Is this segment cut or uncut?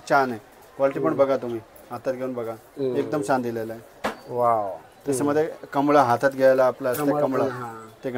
uncut